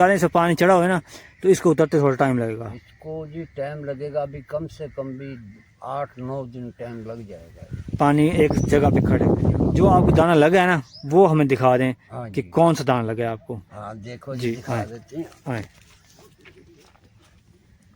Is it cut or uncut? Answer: cut